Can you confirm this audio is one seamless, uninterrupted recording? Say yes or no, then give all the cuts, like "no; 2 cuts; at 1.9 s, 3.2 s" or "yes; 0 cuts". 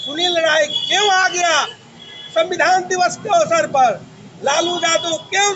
yes; 0 cuts